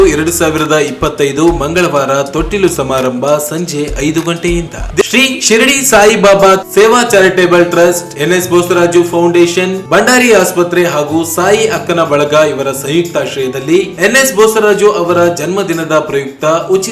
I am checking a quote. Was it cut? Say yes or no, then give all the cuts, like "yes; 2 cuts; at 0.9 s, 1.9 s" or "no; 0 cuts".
yes; 1 cut; at 5.0 s